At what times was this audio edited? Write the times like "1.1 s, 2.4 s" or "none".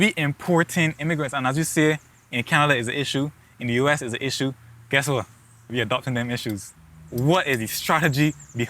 6.7 s